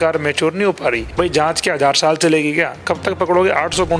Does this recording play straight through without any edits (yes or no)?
no